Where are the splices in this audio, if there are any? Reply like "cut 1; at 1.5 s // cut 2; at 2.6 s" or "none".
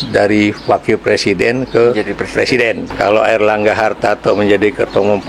cut 1; at 2.9 s